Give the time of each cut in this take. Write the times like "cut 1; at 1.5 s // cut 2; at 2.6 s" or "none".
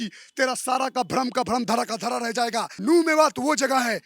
cut 1; at 2.7 s